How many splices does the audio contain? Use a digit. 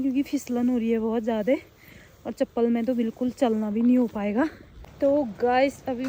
0